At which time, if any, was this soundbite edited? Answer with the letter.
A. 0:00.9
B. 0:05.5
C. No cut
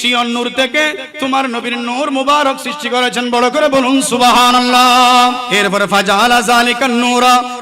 B